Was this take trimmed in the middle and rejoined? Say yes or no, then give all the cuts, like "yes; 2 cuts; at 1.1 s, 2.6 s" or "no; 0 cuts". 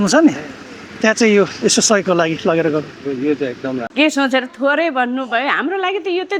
yes; 1 cut; at 3.9 s